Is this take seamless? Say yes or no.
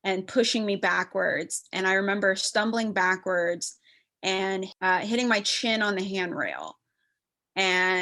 yes